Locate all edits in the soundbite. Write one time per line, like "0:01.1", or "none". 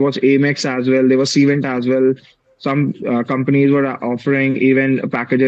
none